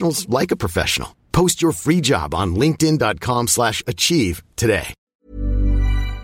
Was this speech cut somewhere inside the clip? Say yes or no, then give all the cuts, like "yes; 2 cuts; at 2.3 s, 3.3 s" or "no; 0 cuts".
yes; 1 cut; at 5.0 s